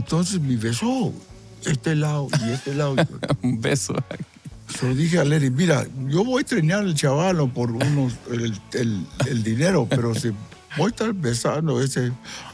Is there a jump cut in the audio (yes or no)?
no